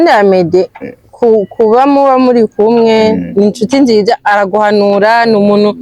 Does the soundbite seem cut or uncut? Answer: uncut